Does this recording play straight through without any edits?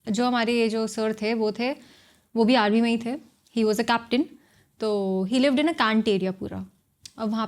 yes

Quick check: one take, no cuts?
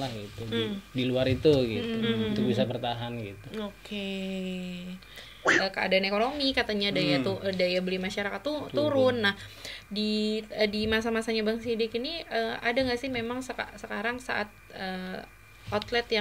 no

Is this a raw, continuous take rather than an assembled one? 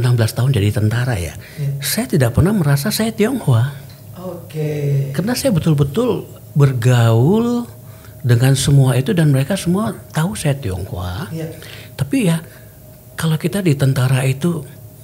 yes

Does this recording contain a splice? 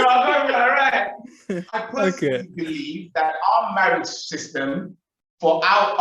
yes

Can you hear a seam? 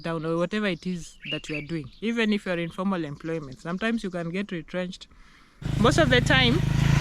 yes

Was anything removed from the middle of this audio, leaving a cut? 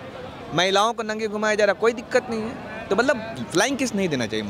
no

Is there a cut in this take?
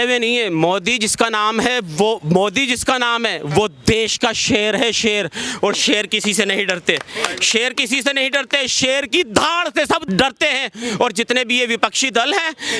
yes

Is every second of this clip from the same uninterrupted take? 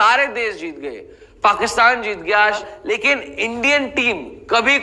no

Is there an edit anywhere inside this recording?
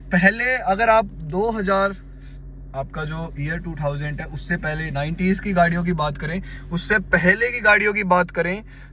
no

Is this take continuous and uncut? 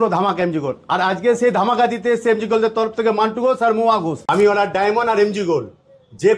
no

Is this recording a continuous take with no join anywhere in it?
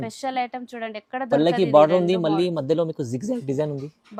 yes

